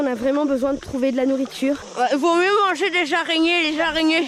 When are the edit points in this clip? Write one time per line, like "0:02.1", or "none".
0:01.9